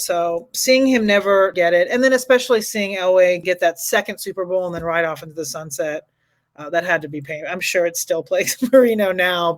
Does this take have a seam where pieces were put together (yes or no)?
yes